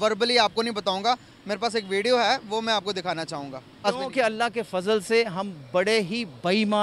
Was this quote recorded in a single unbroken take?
no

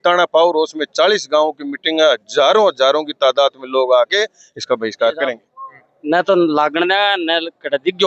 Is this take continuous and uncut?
no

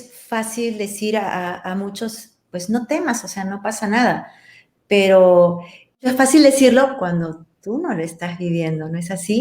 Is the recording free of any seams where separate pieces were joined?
no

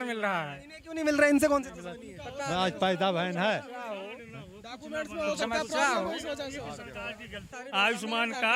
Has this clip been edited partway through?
yes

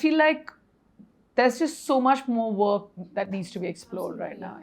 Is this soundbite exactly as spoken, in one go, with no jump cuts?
yes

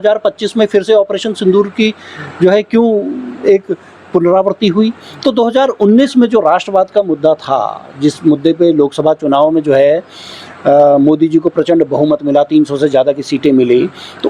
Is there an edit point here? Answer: no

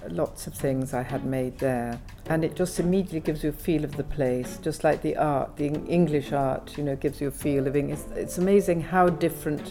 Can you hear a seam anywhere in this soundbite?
no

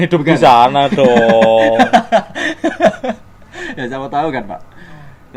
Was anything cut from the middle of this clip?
no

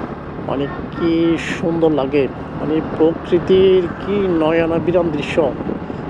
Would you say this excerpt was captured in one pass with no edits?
yes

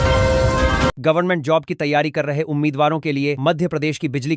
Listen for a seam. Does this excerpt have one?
yes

